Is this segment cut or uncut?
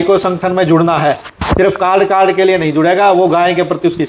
uncut